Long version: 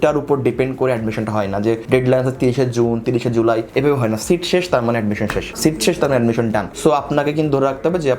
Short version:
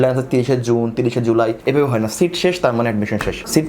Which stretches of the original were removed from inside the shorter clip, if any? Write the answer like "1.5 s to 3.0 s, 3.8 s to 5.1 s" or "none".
none

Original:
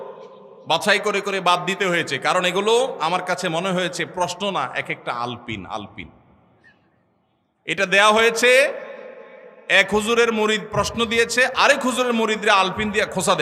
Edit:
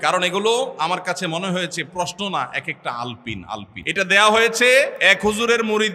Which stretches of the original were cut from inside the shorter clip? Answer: 5.9 s to 7.5 s, 8.8 s to 9.6 s

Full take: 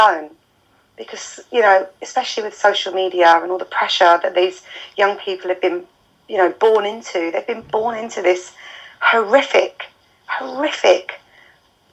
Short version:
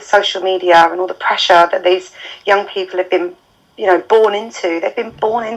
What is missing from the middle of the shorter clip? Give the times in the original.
none

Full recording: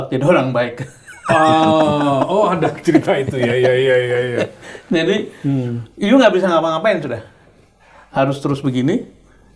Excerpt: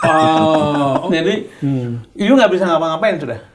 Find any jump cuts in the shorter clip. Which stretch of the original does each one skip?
2.3 s to 4.9 s

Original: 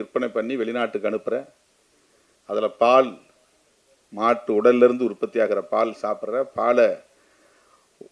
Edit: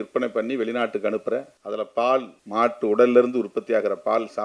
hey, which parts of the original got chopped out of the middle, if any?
1.5 s to 2.4 s, 3.2 s to 4.0 s

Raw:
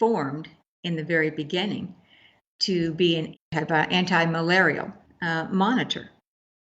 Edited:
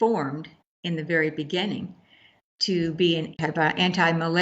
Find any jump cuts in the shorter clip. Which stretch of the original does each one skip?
3.3 s to 3.4 s

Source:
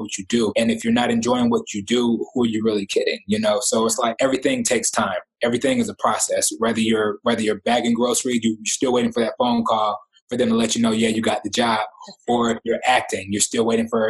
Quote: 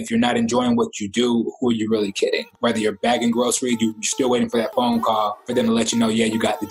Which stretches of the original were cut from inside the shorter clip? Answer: 3.2 s to 7.1 s, 10.0 s to 10.2 s

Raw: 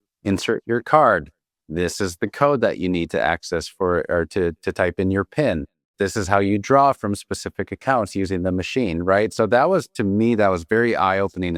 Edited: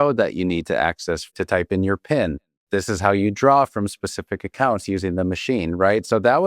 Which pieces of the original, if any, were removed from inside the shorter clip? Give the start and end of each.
3.7 s to 4.6 s

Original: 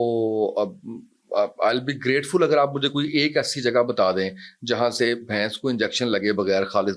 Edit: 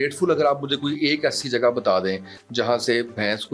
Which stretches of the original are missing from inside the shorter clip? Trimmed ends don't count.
none

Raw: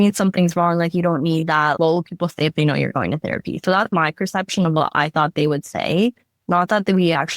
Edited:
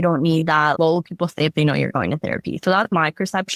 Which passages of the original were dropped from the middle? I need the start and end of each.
none

